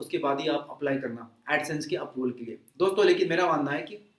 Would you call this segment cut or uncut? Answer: uncut